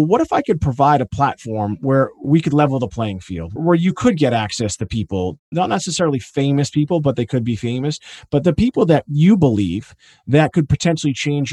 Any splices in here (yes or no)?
no